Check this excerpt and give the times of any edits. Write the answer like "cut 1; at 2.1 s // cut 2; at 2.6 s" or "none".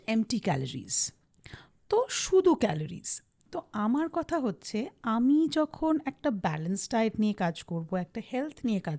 none